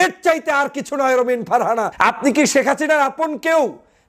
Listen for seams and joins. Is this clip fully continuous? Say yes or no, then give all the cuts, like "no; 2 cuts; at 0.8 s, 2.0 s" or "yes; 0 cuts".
no; 1 cut; at 1.9 s